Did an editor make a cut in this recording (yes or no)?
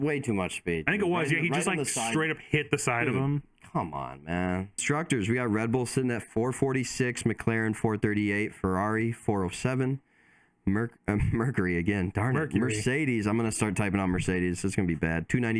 yes